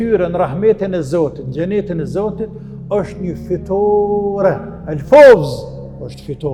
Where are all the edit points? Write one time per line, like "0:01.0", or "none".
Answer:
none